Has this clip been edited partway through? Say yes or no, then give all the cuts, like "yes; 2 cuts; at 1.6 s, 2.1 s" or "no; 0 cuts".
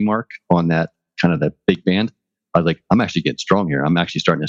yes; 2 cuts; at 0.9 s, 2.8 s